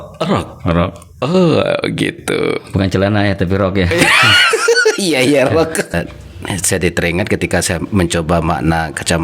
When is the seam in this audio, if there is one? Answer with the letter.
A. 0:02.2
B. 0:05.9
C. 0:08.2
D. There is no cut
B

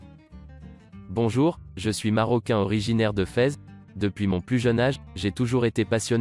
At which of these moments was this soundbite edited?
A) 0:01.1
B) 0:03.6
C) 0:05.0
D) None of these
A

